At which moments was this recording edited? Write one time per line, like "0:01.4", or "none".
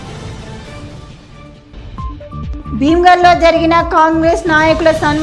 0:02.6